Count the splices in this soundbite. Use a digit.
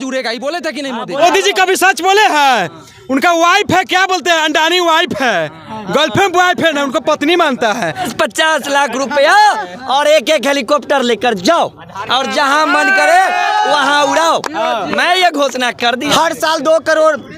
3